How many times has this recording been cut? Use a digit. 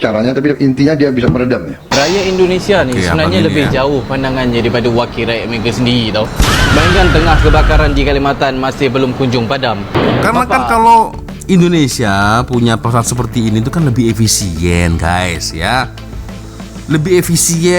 2